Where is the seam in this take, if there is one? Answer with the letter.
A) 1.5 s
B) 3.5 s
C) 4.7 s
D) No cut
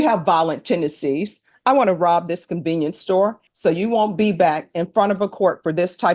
B